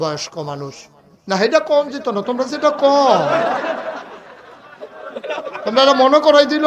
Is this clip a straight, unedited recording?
yes; 0 cuts

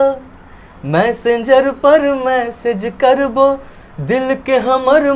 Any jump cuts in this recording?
no; 0 cuts

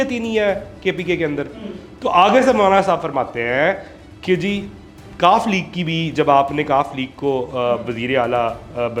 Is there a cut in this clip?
no; 0 cuts

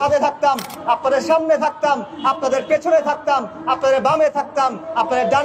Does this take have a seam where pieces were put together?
no; 0 cuts

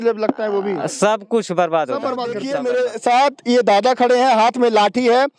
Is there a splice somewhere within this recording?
yes; 1 cut; at 2.6 s

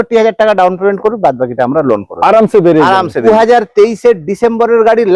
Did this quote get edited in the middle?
yes; 1 cut; at 3.2 s

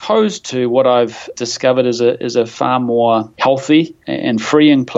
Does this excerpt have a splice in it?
yes; 3 cuts; at 1.3 s, 3.3 s, 4.0 s

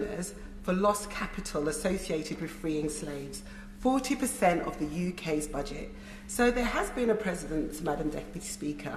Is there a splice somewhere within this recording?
no; 0 cuts

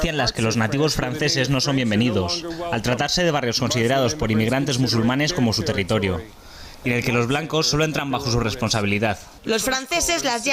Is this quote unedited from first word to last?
no; 1 cut; at 1.5 s

